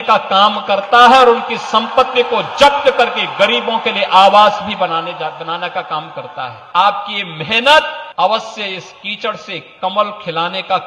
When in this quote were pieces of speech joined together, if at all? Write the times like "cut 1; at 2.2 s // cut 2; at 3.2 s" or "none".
cut 1; at 6.6 s // cut 2; at 8.0 s